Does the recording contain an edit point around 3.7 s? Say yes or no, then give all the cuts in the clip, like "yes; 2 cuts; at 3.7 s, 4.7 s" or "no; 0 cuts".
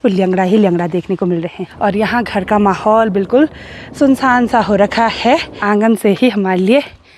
no; 2 cuts; at 1.6 s, 5.5 s